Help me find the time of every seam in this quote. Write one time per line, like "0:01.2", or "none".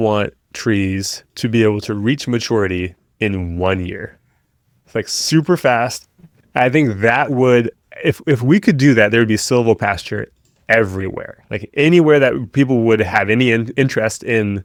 none